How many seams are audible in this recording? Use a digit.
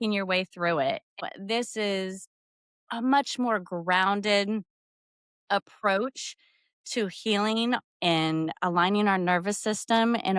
1